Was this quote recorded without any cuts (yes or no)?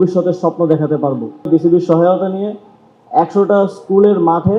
no